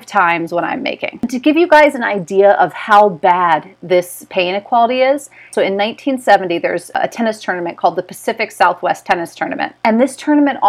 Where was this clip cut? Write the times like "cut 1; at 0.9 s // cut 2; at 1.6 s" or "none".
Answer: cut 1; at 1.3 s // cut 2; at 5.5 s // cut 3; at 7.0 s // cut 4; at 9.7 s